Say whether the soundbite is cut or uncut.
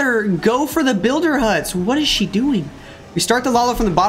uncut